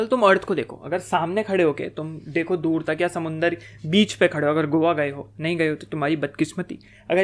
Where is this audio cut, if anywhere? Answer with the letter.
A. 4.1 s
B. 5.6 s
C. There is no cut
C